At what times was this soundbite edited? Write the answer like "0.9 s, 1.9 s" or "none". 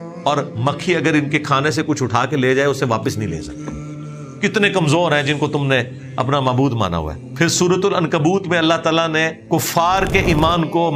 7.2 s, 9.4 s